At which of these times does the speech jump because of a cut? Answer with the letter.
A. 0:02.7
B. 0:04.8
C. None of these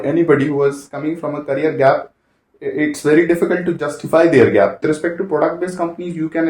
B